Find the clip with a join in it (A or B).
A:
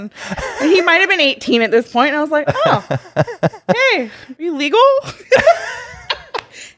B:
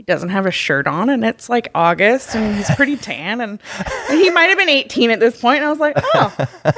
A